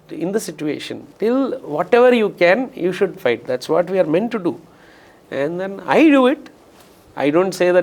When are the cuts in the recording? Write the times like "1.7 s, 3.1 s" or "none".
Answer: none